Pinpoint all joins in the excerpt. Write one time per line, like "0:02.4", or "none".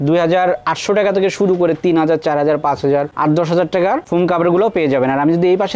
none